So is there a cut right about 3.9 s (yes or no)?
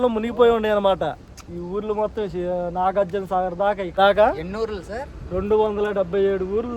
yes